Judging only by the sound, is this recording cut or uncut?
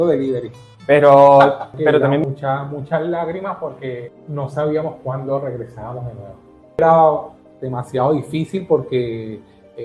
cut